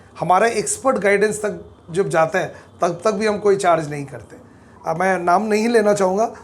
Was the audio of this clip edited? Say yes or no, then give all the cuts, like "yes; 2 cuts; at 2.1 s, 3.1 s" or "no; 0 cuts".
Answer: yes; 1 cut; at 4.7 s